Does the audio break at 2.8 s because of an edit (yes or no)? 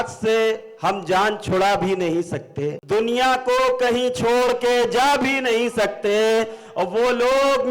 yes